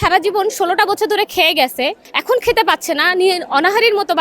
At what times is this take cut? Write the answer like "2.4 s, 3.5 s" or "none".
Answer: 2.1 s

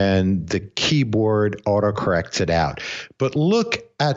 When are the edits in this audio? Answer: none

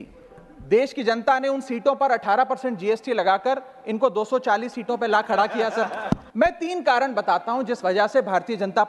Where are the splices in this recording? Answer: 6.3 s

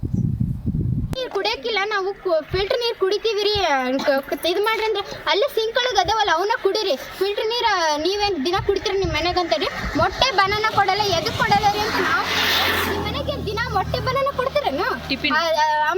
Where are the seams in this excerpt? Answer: 1.1 s

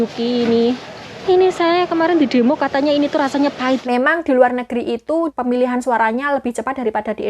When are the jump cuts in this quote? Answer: 1.1 s, 3.8 s, 5.3 s

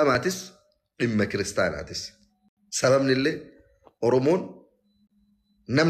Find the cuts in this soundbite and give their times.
none

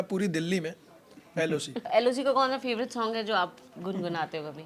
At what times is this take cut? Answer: 1.8 s

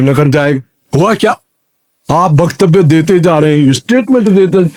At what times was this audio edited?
none

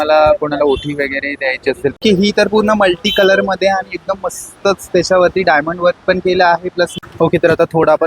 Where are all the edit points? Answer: 1.9 s, 7.0 s

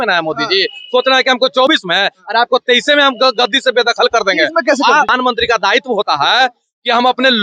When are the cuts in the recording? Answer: 5.1 s

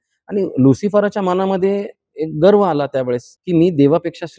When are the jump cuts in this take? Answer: 3.3 s

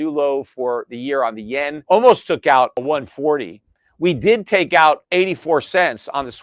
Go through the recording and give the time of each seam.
1.8 s, 2.8 s, 5.0 s

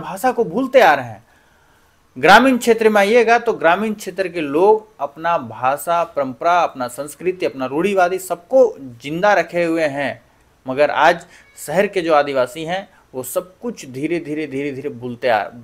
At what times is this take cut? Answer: none

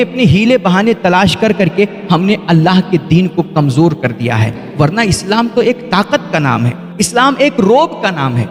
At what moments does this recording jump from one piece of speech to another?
none

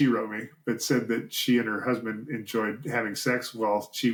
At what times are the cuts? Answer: none

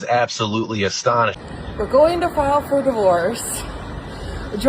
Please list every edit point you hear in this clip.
1.5 s

